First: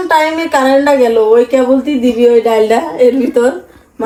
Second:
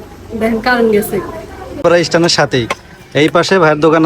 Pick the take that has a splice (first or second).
second